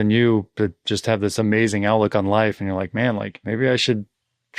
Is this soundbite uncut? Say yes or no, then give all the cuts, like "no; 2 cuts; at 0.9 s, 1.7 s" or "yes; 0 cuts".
no; 1 cut; at 3.4 s